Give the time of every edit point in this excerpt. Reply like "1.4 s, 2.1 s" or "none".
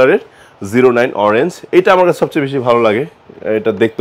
none

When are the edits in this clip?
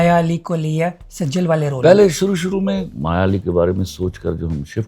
2.9 s

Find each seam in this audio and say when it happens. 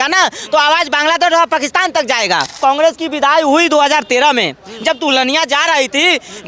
2.6 s

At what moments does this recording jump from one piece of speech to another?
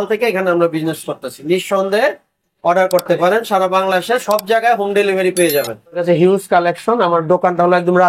6.0 s

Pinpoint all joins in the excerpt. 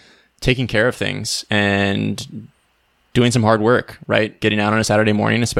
none

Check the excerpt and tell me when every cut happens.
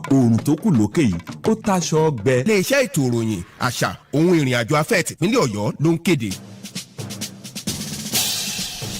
6.4 s

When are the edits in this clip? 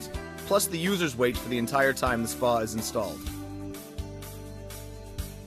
3.1 s

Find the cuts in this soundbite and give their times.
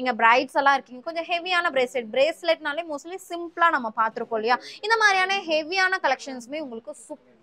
none

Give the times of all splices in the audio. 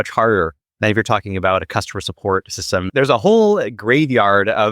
2.9 s

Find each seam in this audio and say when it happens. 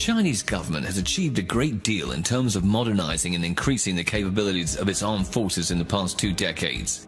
4.1 s

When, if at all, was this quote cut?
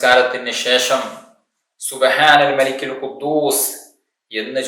none

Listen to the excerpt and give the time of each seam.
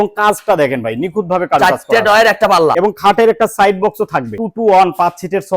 2.8 s, 4.4 s

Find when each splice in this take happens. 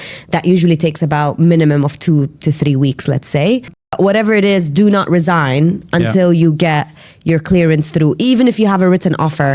3.8 s

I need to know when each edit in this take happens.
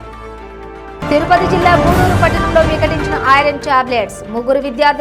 1.0 s

